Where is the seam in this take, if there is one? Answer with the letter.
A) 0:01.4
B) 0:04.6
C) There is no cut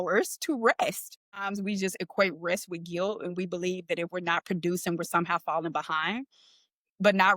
A